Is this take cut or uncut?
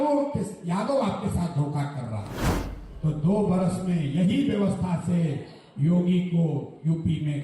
cut